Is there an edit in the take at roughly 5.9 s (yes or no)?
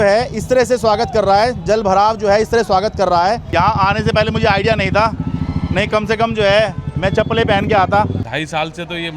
no